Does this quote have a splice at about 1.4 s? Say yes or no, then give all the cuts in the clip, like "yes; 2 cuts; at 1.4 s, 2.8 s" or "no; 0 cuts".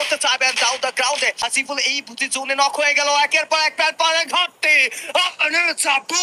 yes; 1 cut; at 1.4 s